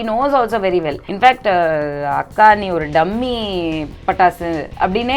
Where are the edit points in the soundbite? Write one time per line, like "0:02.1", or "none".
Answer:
0:01.0